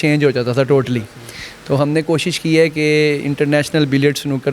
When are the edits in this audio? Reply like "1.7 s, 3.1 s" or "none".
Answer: none